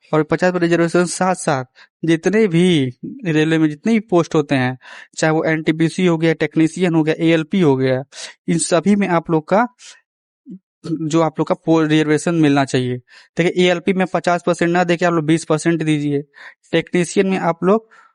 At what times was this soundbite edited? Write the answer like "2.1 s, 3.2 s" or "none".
none